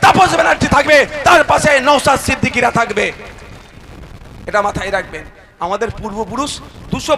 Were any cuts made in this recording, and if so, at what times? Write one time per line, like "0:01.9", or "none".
none